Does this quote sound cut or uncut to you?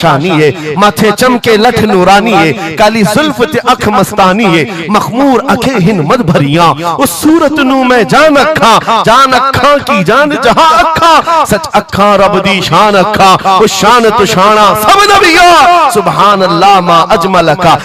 uncut